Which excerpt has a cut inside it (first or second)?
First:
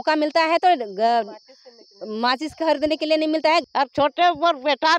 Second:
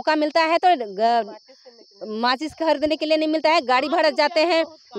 first